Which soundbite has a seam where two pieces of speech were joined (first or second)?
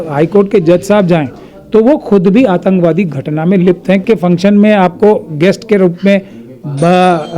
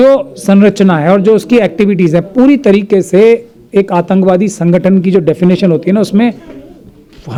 first